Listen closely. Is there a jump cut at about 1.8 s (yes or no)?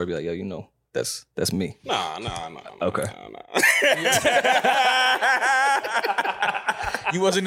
yes